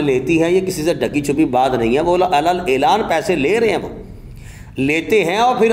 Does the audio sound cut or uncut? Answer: uncut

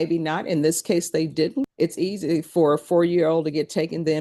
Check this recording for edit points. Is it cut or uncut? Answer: cut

